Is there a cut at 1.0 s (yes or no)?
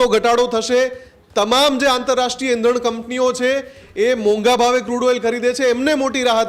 no